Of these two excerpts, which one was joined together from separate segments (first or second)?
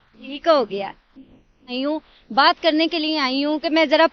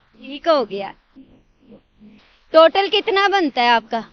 first